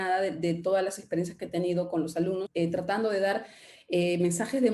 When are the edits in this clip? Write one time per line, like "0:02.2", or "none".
0:02.5

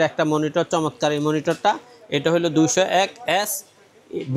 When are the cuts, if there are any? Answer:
none

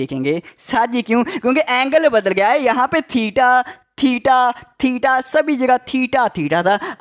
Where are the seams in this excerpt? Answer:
none

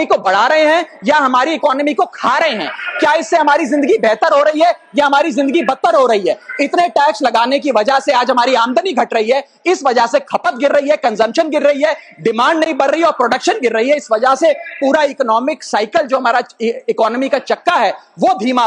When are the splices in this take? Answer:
none

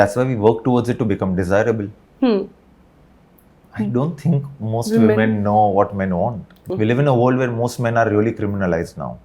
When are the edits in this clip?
0:06.7

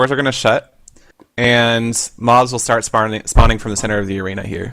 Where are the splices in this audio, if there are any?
0:03.8

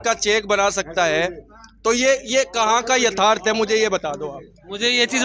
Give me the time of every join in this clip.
none

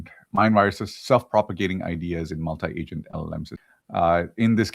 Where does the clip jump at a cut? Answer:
0:01.5
0:03.6

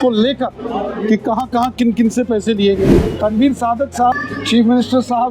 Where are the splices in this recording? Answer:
0:02.9
0:04.1

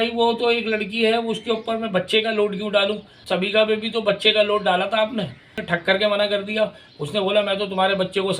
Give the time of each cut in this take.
0:03.1
0:05.6

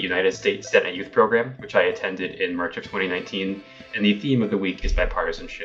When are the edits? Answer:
0:03.8

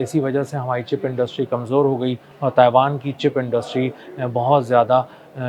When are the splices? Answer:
none

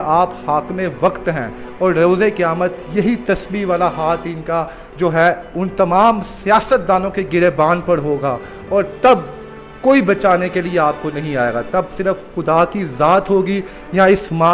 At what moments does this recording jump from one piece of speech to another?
none

